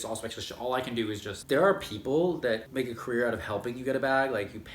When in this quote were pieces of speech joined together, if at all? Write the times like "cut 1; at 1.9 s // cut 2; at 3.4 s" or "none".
cut 1; at 1.3 s // cut 2; at 2.7 s